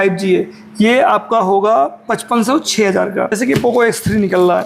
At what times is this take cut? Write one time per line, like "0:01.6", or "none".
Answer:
0:03.3